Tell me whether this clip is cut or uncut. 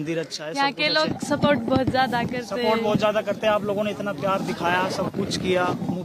uncut